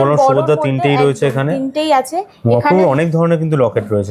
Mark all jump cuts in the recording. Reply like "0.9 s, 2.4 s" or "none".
none